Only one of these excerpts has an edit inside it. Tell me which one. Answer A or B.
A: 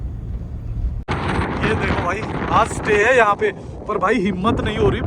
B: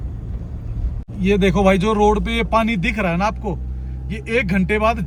A